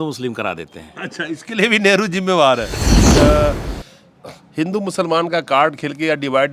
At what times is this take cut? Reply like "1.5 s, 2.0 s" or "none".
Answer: 3.0 s